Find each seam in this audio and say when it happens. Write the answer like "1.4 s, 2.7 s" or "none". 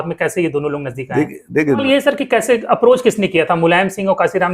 1.8 s